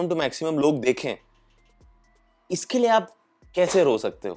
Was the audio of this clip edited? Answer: no; 0 cuts

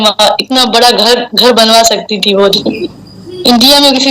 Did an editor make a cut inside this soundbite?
yes; 1 cut; at 2.6 s

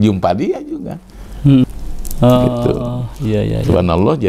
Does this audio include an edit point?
yes; 1 cut; at 1.6 s

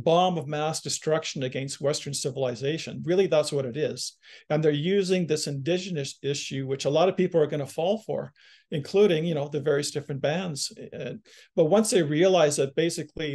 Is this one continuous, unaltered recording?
yes; 0 cuts

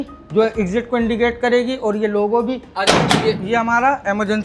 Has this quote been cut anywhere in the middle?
yes; 1 cut; at 2.7 s

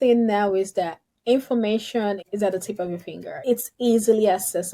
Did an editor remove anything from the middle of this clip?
yes; 1 cut; at 3.4 s

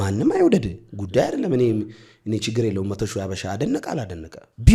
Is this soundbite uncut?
yes; 0 cuts

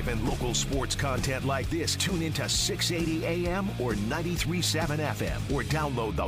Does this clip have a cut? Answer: no; 0 cuts

